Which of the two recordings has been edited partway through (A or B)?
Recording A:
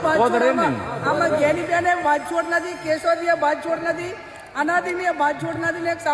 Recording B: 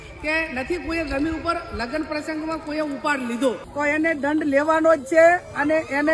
B